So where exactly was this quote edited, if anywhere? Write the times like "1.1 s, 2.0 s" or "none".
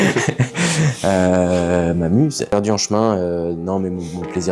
2.5 s